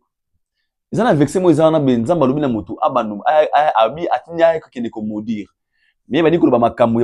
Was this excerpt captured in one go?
yes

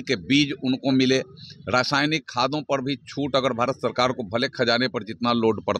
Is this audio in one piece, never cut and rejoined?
yes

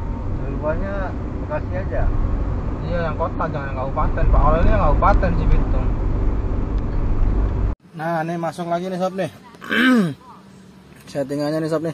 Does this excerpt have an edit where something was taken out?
yes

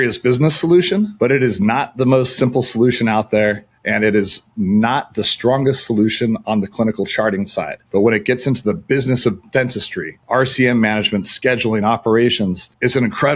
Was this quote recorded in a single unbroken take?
no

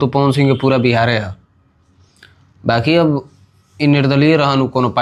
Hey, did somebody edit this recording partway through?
no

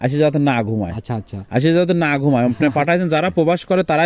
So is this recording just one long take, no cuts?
yes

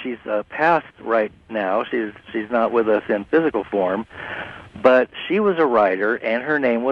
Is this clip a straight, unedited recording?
no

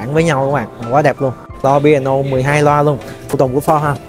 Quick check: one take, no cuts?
no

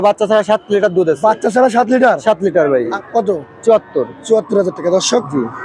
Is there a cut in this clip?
yes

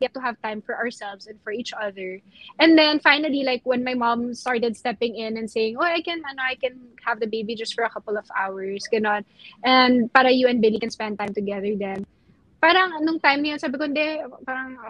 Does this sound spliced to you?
no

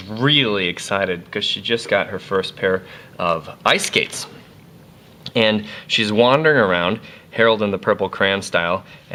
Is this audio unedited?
yes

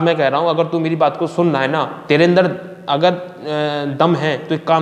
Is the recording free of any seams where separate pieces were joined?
no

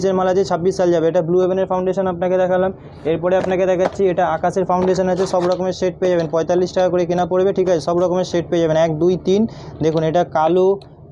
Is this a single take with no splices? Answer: yes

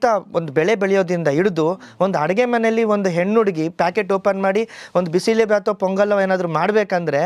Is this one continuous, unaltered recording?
yes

